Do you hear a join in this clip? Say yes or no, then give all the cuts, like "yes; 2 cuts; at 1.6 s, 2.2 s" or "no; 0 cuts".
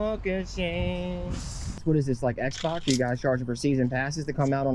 yes; 1 cut; at 1.8 s